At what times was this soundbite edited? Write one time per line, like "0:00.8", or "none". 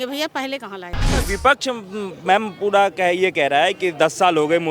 0:01.1